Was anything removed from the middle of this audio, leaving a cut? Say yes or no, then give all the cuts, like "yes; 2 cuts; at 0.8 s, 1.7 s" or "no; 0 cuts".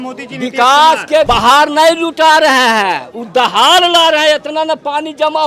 yes; 1 cut; at 1.3 s